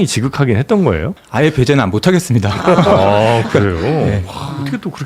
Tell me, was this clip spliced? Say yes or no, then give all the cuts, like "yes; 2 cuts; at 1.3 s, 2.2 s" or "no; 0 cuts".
yes; 1 cut; at 1.2 s